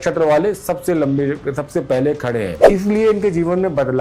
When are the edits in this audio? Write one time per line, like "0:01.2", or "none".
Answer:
0:02.6